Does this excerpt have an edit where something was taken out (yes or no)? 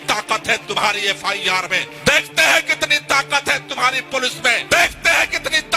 yes